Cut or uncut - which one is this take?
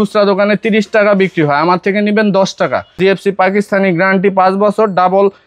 cut